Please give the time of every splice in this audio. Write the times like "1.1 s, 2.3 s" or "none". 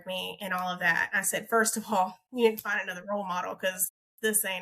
none